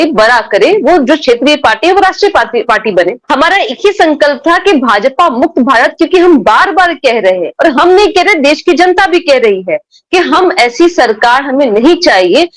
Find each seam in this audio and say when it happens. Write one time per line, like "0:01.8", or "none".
0:03.2